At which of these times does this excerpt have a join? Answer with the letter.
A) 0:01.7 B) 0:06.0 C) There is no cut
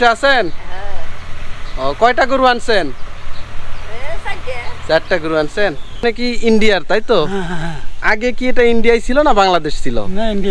B